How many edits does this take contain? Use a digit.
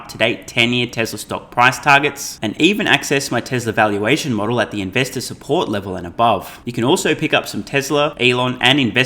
2